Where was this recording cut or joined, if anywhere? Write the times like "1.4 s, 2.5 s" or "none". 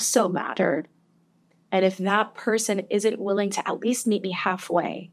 none

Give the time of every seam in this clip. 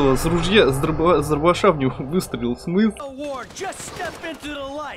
3.0 s

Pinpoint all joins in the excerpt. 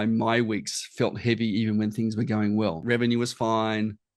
2.8 s

